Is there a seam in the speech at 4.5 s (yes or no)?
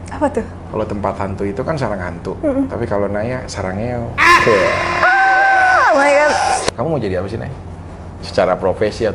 no